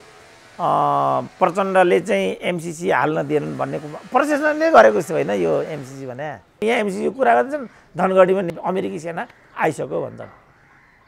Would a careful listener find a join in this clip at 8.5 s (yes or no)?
yes